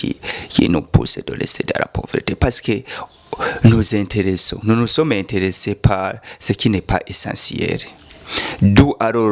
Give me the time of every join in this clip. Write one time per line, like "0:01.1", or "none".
none